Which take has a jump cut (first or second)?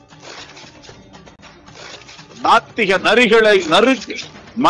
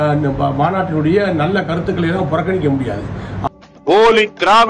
second